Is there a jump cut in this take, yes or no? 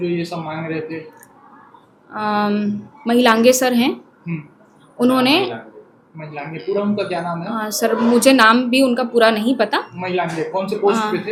no